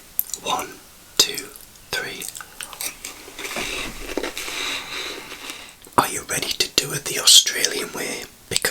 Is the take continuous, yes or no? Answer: no